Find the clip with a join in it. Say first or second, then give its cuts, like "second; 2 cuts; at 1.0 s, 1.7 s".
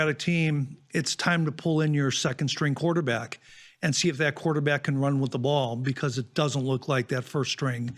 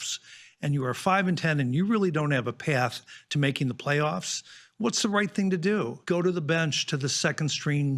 second; 1 cut; at 6.0 s